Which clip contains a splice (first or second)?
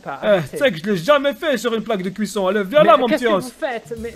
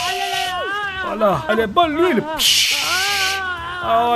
second